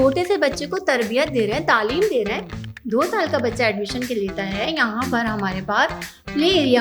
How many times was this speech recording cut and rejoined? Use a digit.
0